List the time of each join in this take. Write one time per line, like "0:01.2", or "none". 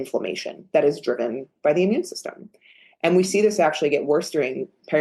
none